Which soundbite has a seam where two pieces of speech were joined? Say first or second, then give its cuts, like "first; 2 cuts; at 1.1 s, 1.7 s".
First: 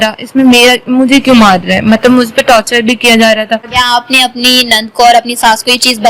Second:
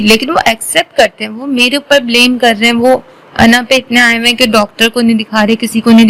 first; 1 cut; at 3.7 s